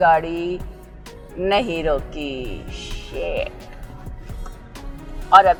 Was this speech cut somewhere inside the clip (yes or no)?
no